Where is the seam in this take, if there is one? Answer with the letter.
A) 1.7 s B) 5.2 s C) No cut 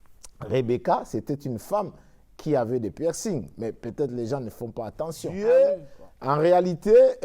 B